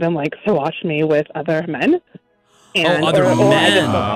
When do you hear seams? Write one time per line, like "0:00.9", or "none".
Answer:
none